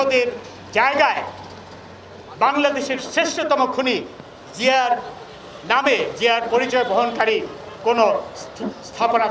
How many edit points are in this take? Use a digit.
0